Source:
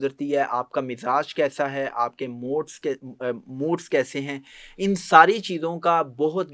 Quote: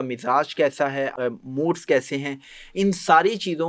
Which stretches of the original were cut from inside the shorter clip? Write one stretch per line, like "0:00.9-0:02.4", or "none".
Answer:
0:01.9-0:03.2